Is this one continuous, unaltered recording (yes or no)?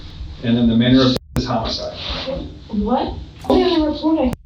no